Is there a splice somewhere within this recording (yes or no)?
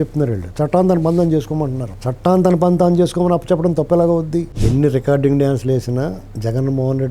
yes